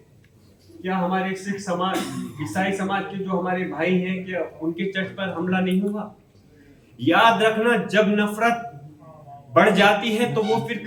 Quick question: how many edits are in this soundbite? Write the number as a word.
zero